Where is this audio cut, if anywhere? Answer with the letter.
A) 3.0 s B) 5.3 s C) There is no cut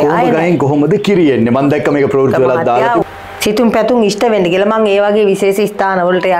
A